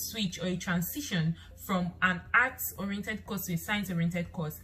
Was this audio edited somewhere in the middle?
no; 0 cuts

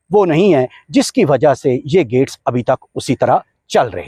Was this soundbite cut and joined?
no; 0 cuts

